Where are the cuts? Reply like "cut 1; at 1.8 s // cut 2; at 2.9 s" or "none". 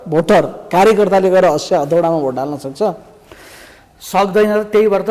none